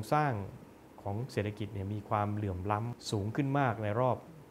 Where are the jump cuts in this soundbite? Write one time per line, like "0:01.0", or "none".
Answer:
0:03.0